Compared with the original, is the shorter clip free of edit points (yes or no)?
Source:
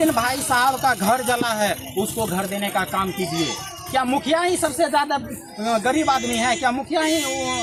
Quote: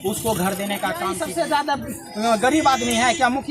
no